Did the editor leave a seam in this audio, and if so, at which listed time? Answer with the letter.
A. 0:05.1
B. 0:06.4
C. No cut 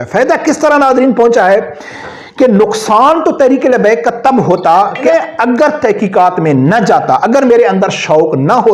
A